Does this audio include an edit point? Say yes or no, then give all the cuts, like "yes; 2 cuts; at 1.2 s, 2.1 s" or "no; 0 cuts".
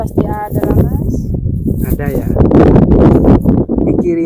no; 0 cuts